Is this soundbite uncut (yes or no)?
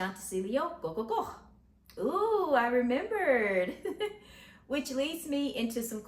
yes